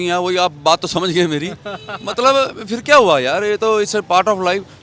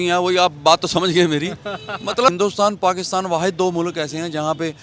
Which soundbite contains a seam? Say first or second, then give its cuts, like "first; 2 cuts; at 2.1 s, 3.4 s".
second; 1 cut; at 2.3 s